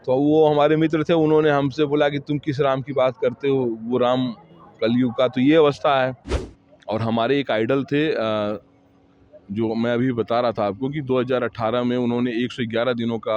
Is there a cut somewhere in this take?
yes; 1 cut; at 6.3 s

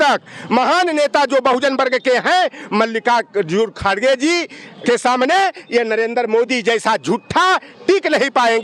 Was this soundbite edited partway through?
yes; 1 cut; at 4.8 s

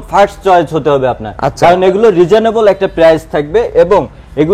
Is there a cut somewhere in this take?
no; 0 cuts

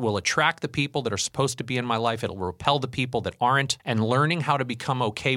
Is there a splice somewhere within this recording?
yes; 1 cut; at 3.8 s

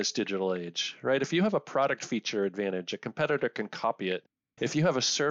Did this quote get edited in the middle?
no; 0 cuts

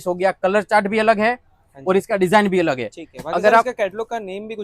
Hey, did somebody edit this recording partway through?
no; 0 cuts

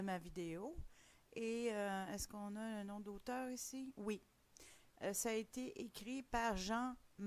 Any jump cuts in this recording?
yes; 1 cut; at 2.3 s

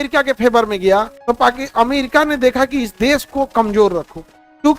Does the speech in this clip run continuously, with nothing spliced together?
no; 1 cut; at 1.1 s

